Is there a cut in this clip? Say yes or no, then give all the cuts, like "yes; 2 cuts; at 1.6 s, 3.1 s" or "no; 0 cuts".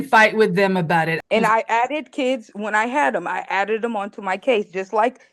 yes; 1 cut; at 1.1 s